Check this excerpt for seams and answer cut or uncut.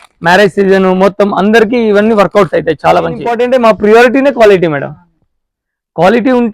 cut